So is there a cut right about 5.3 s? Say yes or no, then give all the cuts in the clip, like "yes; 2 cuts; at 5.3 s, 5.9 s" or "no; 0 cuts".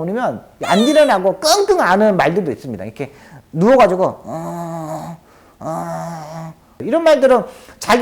no; 1 cut; at 6.8 s